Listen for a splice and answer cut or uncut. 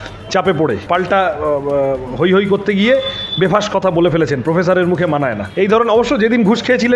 cut